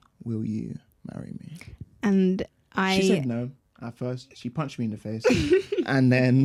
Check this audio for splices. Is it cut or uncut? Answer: uncut